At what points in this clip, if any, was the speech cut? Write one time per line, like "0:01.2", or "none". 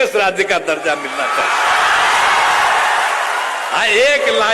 none

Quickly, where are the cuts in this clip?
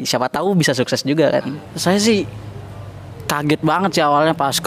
0:01.7

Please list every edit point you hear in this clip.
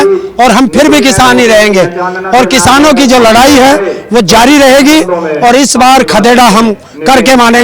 none

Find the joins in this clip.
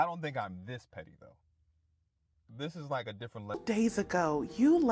0:03.5

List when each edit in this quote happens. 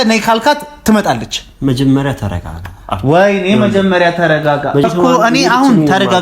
0:04.8

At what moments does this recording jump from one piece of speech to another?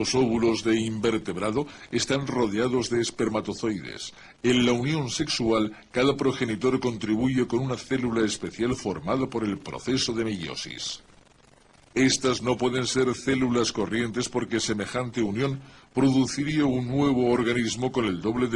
0:16.3

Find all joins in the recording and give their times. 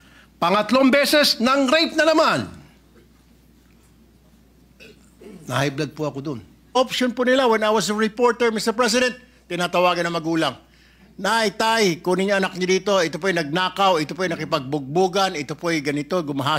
0:06.7

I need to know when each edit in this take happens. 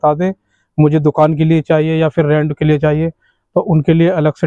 none

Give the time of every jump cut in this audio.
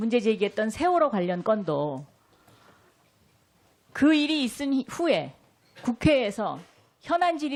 none

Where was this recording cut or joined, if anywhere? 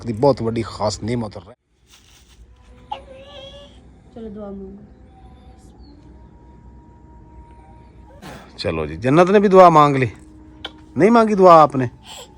0:01.4
0:08.2

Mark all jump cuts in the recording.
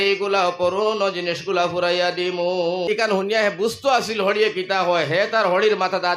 0:02.8

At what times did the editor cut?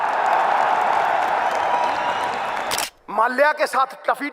0:02.8

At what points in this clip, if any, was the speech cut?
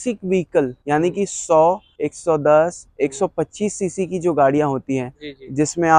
none

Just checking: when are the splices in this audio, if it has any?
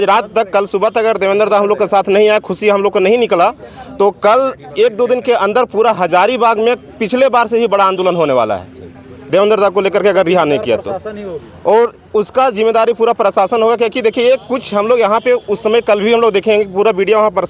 none

